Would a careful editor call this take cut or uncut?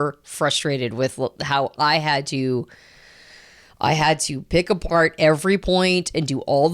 uncut